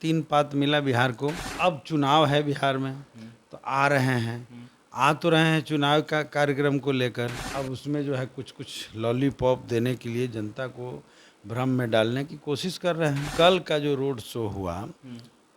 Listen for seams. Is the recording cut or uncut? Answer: cut